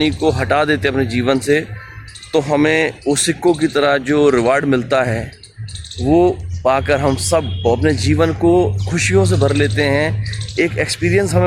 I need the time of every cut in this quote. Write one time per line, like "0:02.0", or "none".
none